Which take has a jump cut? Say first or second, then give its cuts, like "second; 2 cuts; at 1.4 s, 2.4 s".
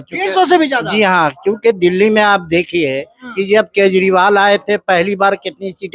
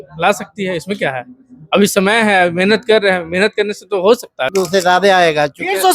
second; 1 cut; at 4.5 s